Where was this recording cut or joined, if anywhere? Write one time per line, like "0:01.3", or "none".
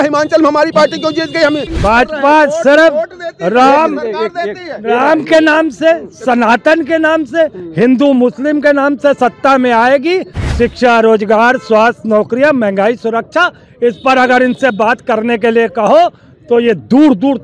0:01.7